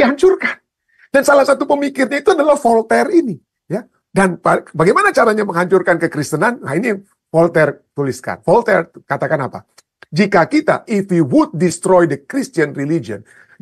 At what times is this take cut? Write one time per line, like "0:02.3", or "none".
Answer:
none